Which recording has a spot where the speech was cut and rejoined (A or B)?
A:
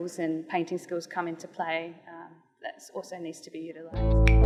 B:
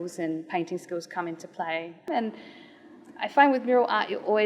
B